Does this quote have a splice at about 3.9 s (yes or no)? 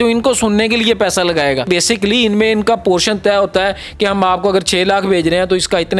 no